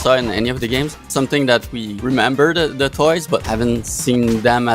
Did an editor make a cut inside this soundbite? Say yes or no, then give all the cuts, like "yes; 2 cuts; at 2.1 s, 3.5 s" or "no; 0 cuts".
yes; 3 cuts; at 1.0 s, 1.8 s, 3.4 s